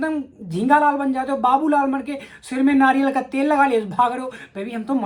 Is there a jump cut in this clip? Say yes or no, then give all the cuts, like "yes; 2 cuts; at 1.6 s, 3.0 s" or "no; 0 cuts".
no; 0 cuts